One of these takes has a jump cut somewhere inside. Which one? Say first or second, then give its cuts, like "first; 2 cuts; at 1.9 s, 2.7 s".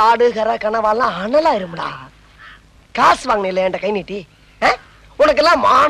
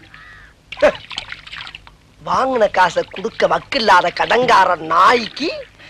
first; 1 cut; at 5.0 s